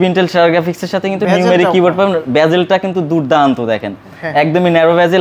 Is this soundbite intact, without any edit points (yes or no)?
yes